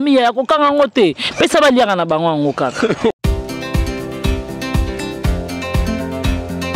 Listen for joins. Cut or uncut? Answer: cut